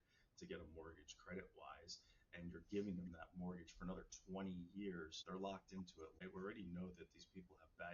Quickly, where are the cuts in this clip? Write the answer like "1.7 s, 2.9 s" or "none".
5.2 s, 6.2 s

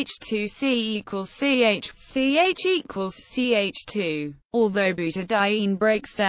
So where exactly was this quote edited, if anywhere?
0.9 s

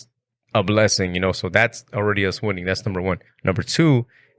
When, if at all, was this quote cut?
3.3 s

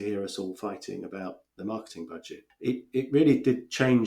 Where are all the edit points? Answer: 2.4 s

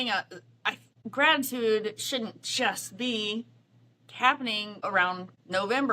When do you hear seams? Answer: 0.9 s, 4.9 s

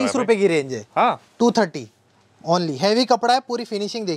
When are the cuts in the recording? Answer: none

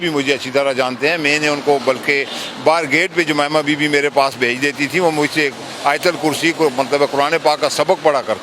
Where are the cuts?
none

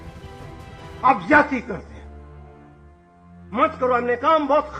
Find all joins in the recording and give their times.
1.0 s, 1.9 s, 3.5 s

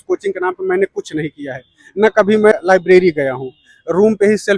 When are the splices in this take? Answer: 2.5 s

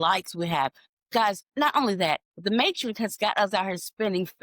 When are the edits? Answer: 1.5 s

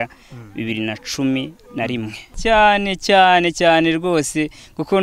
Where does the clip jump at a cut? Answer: 2.3 s

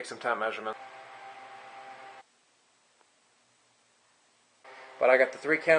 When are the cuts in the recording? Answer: none

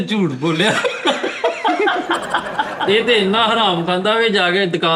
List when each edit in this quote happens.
2.9 s

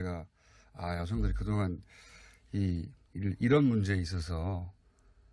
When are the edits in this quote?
1.4 s

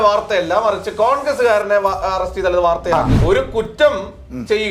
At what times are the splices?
3.1 s

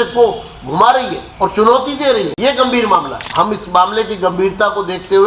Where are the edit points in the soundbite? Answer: 1.2 s, 2.3 s, 3.2 s

